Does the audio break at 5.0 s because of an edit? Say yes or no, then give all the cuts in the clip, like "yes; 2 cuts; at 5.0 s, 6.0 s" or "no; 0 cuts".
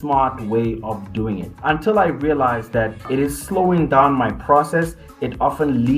no; 2 cuts; at 1.5 s, 3.0 s